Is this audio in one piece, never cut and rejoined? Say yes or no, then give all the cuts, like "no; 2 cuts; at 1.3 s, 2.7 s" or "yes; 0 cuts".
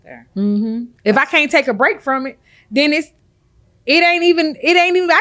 no; 1 cut; at 0.9 s